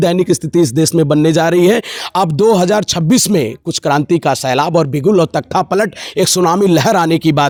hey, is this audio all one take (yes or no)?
yes